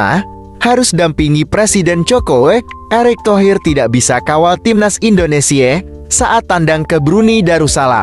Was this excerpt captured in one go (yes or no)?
yes